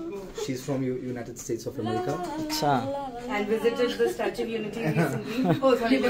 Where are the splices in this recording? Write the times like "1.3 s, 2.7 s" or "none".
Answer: none